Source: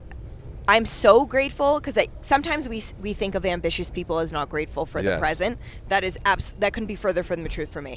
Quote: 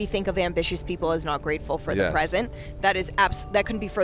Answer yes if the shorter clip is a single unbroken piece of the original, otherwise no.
yes